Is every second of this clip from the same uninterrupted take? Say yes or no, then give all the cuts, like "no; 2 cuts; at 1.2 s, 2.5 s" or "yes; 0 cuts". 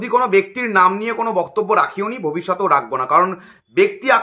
yes; 0 cuts